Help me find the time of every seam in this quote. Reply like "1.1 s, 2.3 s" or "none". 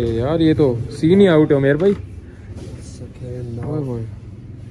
none